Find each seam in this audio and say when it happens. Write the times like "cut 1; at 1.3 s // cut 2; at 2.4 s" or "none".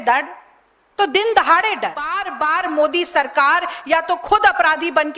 cut 1; at 2.4 s